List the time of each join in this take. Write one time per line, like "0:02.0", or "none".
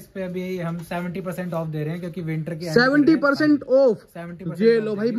none